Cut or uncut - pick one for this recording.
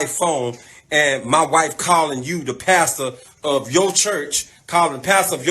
cut